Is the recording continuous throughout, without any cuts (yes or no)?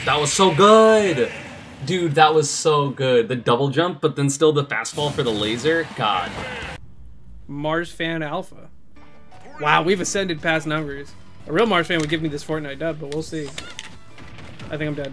yes